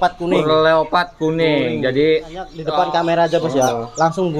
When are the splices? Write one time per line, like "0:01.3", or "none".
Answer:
0:02.6